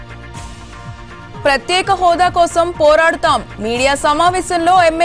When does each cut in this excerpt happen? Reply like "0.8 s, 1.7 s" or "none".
1.0 s